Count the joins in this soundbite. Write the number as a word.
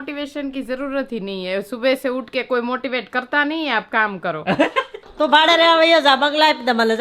one